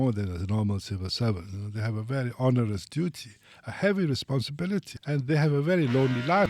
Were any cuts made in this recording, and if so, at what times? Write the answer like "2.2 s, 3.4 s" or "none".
none